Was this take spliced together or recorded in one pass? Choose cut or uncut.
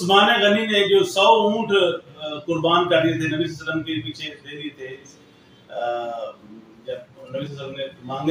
uncut